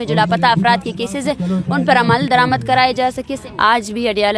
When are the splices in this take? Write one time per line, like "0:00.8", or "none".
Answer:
0:03.3